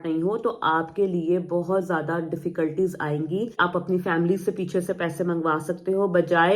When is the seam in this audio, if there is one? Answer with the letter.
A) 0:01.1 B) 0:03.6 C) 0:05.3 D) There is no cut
B